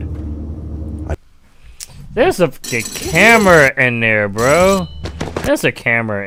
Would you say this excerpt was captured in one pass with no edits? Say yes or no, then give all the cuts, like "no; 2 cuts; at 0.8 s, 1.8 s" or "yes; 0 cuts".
yes; 0 cuts